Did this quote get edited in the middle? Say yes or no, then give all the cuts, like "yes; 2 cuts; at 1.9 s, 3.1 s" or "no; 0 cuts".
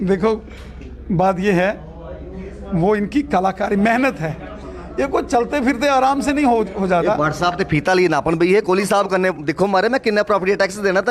no; 0 cuts